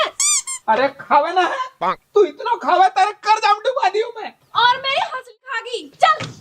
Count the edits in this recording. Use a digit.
1